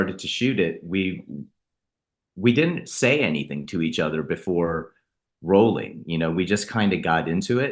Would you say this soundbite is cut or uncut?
uncut